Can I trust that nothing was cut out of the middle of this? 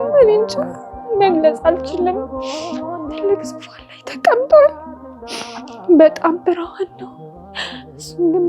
yes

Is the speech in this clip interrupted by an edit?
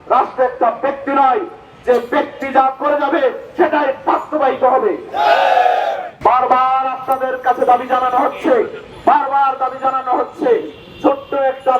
yes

